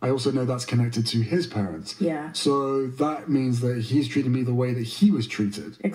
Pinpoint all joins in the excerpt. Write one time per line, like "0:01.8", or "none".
none